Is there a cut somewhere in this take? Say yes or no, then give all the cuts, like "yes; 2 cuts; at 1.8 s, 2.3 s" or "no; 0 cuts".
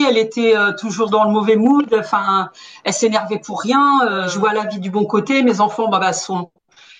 yes; 1 cut; at 4.3 s